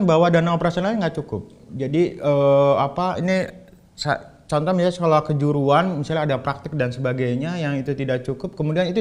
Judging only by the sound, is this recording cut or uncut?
uncut